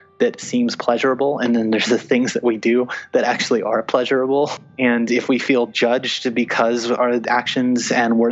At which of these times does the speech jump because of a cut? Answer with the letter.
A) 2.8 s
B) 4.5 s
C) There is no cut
B